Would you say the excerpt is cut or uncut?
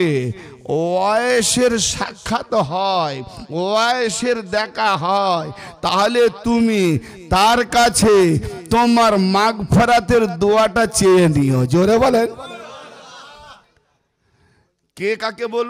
uncut